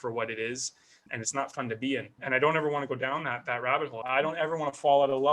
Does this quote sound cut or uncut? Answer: cut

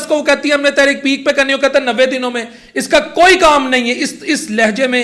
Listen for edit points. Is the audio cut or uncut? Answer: uncut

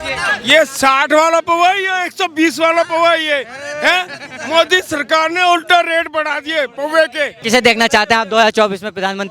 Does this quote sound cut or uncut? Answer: cut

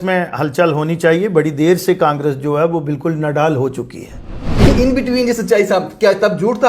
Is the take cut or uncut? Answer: cut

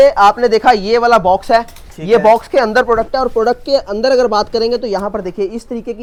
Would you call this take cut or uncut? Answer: uncut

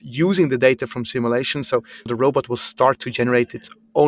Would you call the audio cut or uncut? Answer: cut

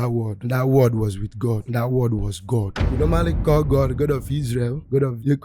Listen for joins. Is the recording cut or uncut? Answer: cut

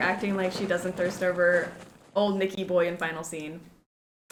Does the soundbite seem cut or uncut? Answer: uncut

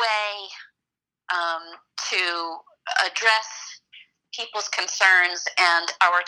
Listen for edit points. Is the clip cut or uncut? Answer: uncut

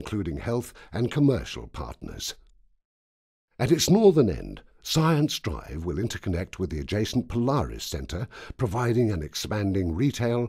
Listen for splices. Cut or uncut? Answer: uncut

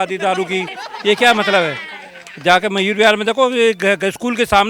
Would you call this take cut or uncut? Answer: uncut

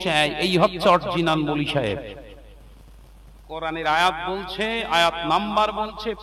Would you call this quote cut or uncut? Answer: uncut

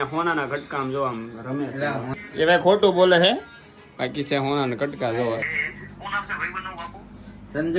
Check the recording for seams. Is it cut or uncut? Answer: cut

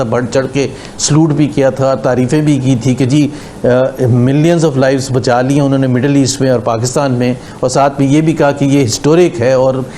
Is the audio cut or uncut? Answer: uncut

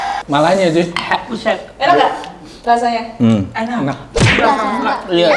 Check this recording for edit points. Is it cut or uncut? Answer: uncut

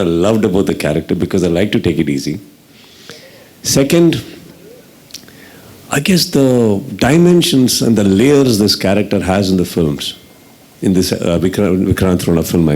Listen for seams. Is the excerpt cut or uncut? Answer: uncut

